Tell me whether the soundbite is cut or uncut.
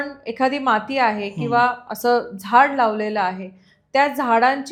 uncut